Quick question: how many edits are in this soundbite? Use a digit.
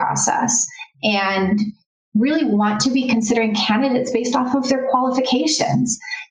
1